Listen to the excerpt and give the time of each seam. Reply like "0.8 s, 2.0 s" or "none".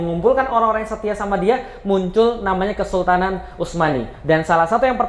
none